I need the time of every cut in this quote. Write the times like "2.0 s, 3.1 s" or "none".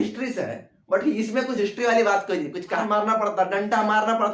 2.8 s